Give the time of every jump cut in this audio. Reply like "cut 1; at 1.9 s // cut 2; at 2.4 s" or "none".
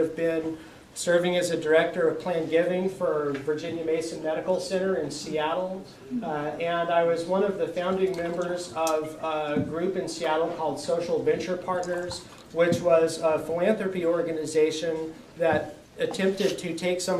none

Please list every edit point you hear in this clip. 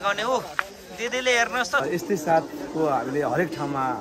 cut 1; at 1.8 s

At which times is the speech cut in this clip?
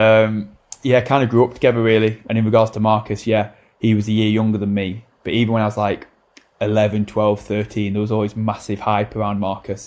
cut 1; at 2.2 s

